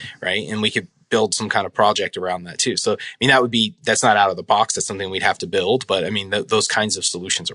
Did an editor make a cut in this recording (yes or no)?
no